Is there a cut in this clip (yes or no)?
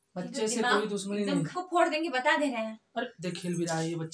yes